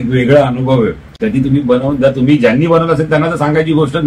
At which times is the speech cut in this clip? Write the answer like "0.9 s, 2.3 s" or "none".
none